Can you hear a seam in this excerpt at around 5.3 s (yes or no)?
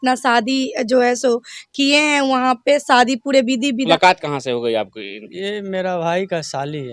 no